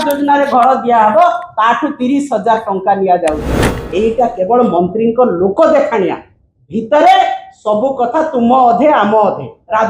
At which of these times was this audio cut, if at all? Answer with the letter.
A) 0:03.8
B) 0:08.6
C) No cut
A